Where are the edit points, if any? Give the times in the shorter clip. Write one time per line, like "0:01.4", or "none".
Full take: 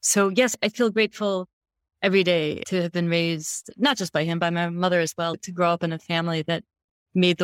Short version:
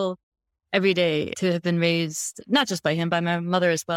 none